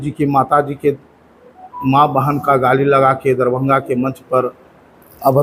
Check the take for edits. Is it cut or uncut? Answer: uncut